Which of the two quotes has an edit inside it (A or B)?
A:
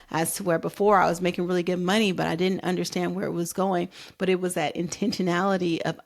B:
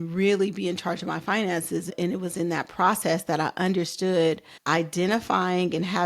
B